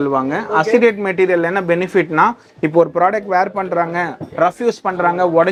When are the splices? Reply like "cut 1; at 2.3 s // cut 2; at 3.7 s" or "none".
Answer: none

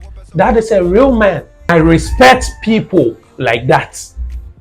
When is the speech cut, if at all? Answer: cut 1; at 1.7 s

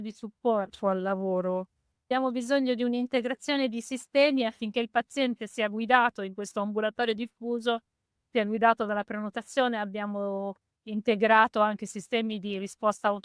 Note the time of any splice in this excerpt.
cut 1; at 2.1 s

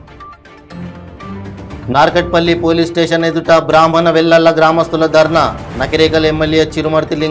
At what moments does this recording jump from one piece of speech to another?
cut 1; at 1.5 s

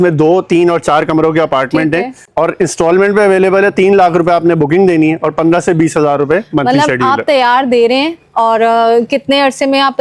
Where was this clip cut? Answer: cut 1; at 2.2 s

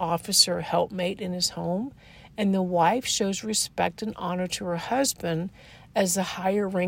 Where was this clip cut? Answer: none

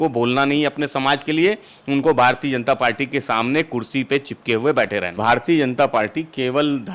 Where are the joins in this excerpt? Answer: cut 1; at 5.2 s

